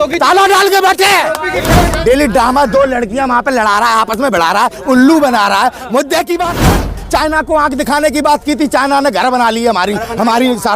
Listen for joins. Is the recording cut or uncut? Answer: cut